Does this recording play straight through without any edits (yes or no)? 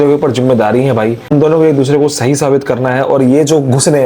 no